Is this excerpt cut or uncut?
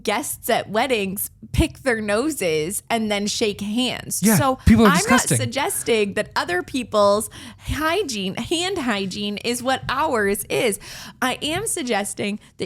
uncut